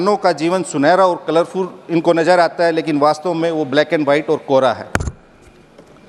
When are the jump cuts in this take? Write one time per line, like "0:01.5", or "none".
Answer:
none